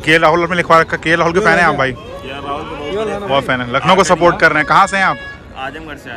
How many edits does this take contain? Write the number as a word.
zero